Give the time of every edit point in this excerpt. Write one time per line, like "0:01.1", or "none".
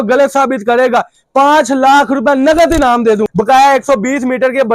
0:03.3